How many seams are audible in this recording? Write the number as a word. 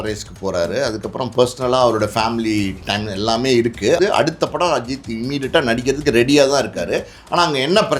one